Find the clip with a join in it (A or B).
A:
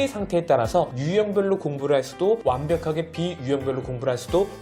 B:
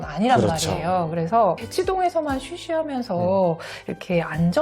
B